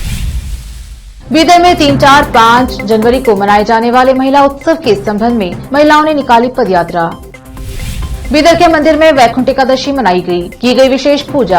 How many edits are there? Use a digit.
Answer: 1